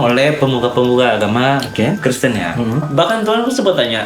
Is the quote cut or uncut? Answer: cut